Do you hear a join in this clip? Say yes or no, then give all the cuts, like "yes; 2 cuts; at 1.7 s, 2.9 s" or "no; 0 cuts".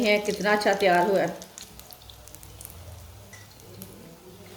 yes; 2 cuts; at 1.7 s, 3.4 s